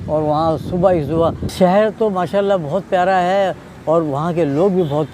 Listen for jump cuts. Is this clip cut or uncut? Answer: cut